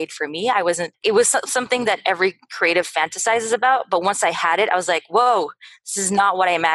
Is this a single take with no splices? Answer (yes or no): no